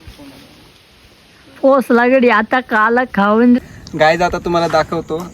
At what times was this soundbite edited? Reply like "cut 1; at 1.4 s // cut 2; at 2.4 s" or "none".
cut 1; at 3.6 s